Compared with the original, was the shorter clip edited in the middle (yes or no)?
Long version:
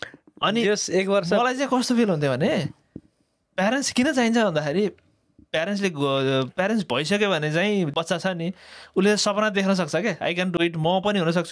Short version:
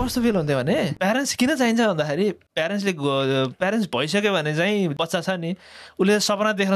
yes